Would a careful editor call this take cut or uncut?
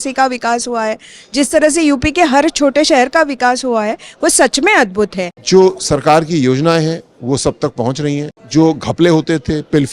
cut